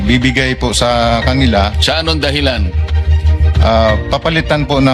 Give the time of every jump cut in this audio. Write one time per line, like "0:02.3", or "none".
none